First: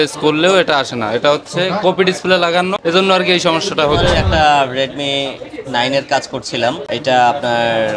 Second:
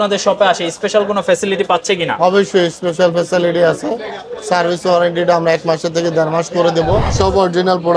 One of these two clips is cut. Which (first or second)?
first